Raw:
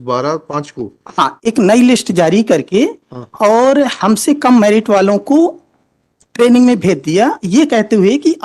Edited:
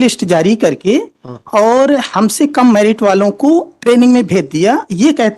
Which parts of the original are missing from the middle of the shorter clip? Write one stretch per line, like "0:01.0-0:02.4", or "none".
0:05.6-0:06.3